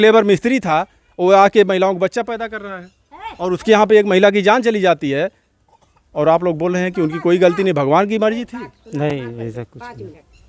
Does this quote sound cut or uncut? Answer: uncut